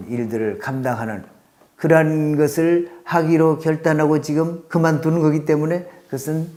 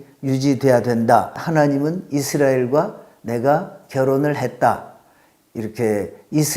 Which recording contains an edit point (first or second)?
second